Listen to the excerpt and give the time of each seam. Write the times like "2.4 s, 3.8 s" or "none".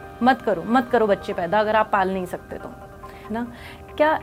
3.3 s